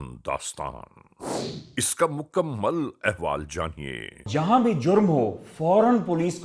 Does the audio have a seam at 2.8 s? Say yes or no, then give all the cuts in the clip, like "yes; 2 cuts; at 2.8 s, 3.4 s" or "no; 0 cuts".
no; 1 cut; at 4.1 s